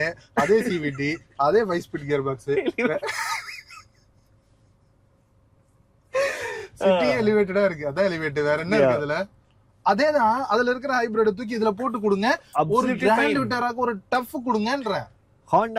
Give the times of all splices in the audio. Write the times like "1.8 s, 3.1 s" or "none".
none